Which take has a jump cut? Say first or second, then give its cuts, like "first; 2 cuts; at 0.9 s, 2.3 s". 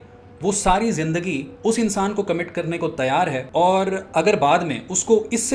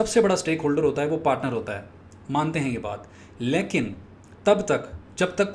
first; 1 cut; at 3.4 s